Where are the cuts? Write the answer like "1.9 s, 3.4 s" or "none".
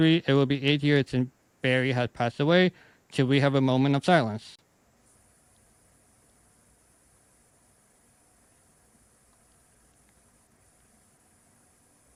none